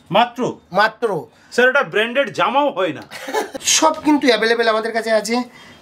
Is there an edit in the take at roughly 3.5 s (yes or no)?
yes